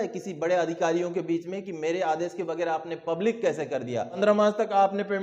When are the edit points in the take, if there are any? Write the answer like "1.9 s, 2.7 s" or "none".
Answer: 4.1 s